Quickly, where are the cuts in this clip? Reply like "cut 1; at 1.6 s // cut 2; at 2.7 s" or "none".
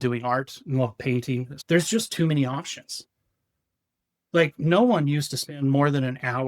cut 1; at 1.5 s